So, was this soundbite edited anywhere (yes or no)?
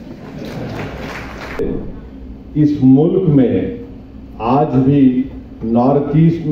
yes